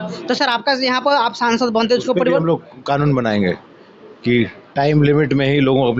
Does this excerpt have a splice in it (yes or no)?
no